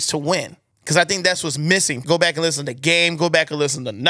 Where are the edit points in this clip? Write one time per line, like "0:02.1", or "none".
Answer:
0:01.9

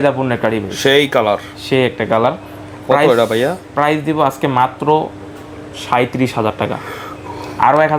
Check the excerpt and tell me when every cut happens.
none

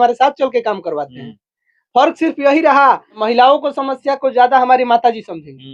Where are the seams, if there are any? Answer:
0:03.2

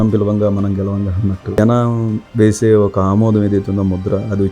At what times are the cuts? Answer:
0:01.4

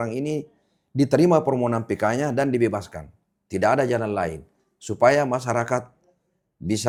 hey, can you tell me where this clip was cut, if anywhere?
none

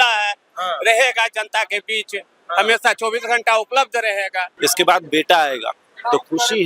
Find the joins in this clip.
0:04.4

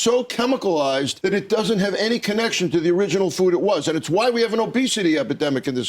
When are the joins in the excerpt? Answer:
0:01.1

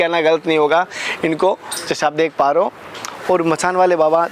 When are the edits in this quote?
none

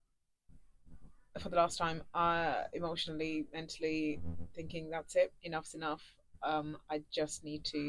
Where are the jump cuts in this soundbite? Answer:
none

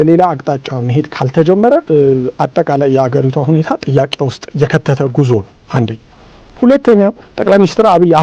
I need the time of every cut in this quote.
0:01.8
0:04.4
0:07.3

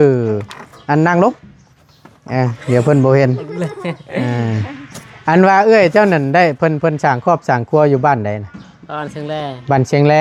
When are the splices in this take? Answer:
none

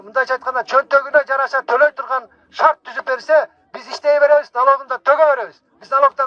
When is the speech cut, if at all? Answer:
none

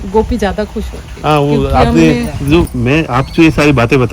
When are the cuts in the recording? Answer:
0:02.3

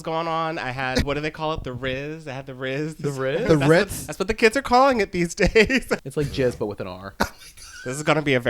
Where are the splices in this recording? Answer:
0:01.1
0:05.9

